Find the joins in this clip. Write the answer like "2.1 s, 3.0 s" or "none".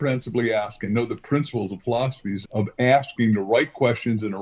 2.4 s

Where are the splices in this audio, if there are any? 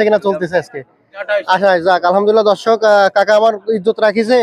1.2 s

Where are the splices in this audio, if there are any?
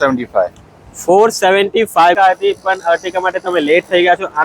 2.2 s

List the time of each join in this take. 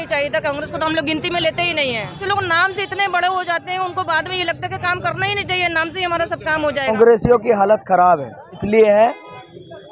2.2 s, 6.9 s, 8.6 s

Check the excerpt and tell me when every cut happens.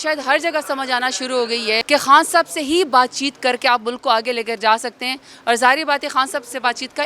1.8 s

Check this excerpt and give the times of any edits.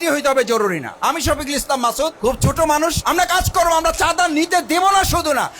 2.1 s, 3.0 s

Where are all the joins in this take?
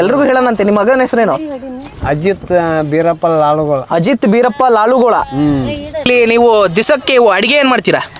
6.0 s

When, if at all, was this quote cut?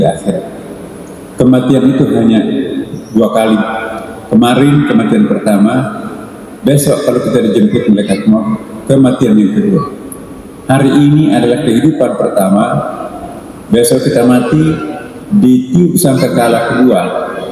none

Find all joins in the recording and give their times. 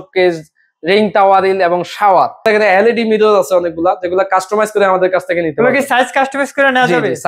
2.5 s

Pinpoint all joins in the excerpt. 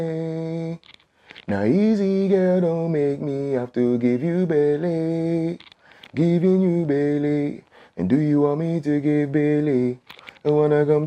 none

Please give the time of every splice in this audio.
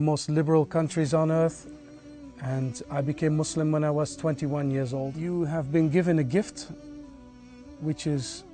5.2 s

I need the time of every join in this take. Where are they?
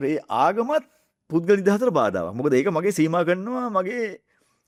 none

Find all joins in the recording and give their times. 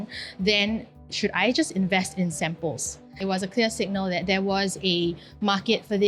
3.0 s

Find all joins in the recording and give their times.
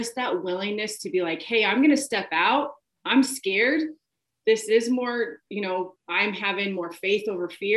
6.0 s

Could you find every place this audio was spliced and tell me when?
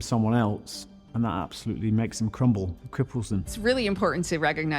3.5 s

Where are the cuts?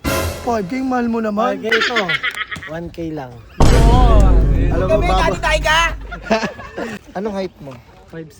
6.9 s

